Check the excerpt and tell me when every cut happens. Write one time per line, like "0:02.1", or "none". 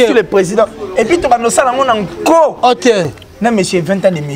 0:03.1